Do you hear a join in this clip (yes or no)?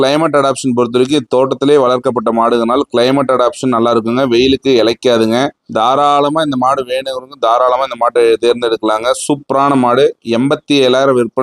no